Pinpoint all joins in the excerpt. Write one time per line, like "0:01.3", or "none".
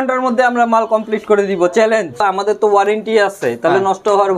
0:02.2